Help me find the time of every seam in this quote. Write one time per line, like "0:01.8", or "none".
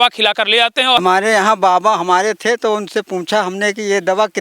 0:01.0

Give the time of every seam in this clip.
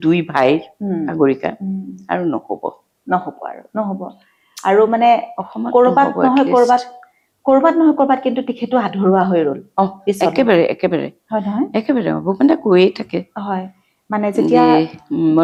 none

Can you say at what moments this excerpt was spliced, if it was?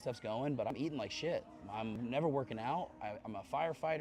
0:00.7
0:02.0

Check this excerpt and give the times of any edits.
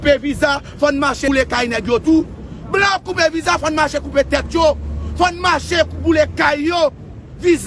0:01.2

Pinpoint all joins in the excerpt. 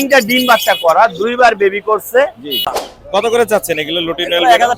0:02.8

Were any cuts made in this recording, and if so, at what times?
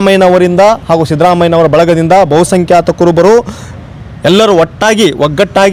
none

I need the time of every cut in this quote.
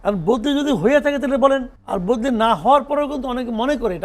0:01.8

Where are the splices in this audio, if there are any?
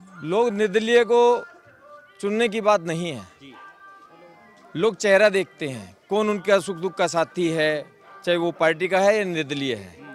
none

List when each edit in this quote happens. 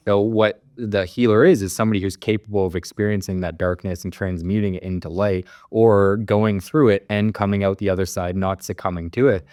none

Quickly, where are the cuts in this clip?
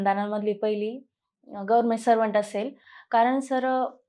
none

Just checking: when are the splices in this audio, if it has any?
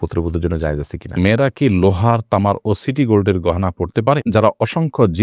0:01.2
0:04.2

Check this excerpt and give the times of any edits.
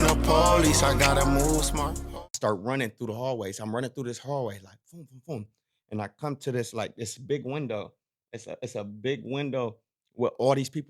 0:02.0

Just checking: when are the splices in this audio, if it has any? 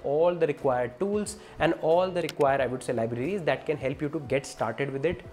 none

